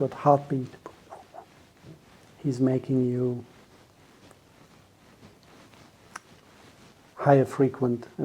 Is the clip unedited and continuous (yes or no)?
no